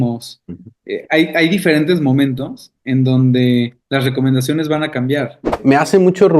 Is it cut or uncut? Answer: cut